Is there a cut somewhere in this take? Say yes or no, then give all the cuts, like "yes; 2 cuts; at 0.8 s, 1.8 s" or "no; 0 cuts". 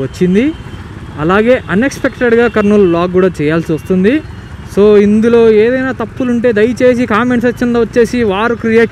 no; 0 cuts